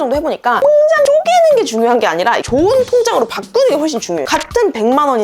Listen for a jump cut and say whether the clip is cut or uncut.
cut